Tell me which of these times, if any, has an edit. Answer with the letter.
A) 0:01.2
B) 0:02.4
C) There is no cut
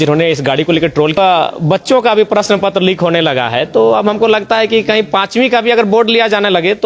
A